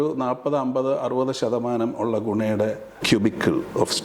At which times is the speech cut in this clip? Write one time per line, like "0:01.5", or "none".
0:02.9